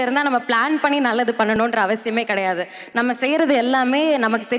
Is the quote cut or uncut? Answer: uncut